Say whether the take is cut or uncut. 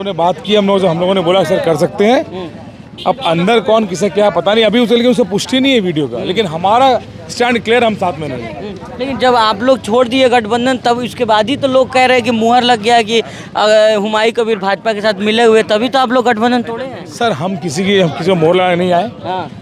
uncut